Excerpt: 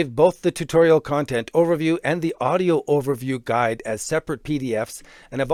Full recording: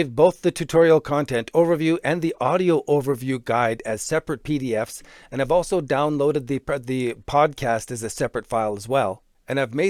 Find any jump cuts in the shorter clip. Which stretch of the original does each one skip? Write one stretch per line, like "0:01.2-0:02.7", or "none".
none